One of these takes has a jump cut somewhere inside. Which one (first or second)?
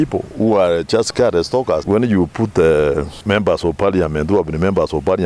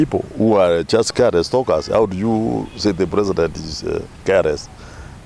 first